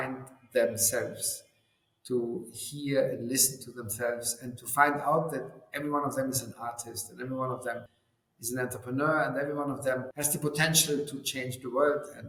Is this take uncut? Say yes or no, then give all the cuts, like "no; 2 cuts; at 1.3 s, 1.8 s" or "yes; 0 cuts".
yes; 0 cuts